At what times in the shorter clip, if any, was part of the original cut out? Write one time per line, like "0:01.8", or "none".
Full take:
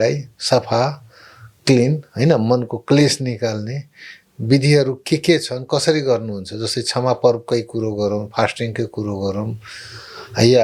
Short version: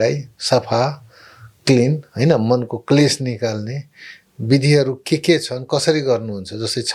none